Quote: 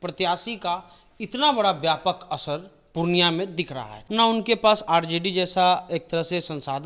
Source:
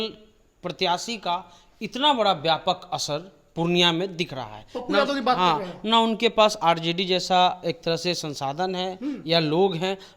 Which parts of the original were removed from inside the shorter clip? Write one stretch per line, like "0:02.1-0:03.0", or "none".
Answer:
0:04.6-0:05.7